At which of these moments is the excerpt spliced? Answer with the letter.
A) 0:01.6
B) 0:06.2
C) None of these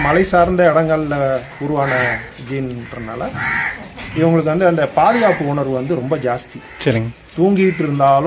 C